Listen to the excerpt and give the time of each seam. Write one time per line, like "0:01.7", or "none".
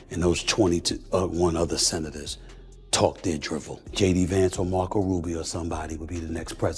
0:03.8